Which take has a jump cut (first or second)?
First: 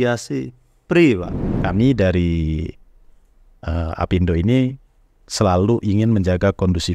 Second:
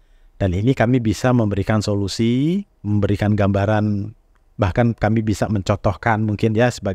first